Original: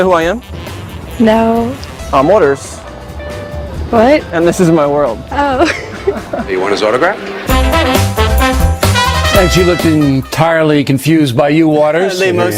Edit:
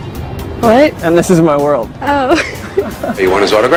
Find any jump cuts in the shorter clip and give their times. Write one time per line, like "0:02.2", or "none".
none